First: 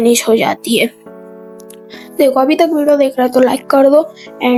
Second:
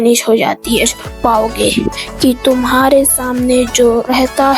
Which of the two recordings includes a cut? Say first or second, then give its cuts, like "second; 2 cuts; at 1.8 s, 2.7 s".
second; 1 cut; at 1.0 s